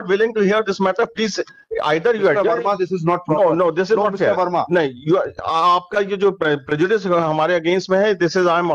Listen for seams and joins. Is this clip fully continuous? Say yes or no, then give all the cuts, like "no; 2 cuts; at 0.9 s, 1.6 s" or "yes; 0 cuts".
yes; 0 cuts